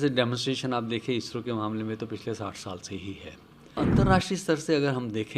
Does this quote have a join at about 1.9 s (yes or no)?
no